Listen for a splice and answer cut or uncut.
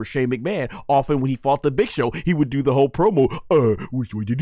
uncut